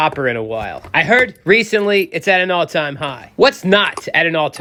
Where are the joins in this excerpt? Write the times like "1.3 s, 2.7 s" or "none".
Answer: none